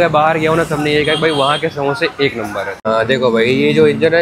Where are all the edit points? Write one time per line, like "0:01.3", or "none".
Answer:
0:02.7